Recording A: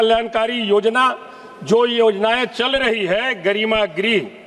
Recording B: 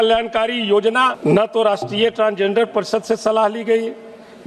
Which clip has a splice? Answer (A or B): B